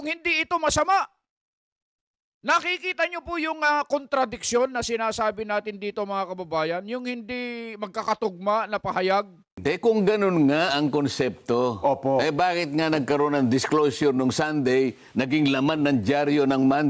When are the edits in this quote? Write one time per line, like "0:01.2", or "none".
0:09.6